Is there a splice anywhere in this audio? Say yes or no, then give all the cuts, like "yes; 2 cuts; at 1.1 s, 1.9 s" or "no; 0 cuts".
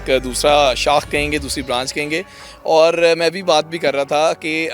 no; 0 cuts